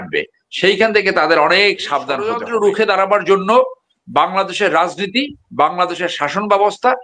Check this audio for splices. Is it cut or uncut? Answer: cut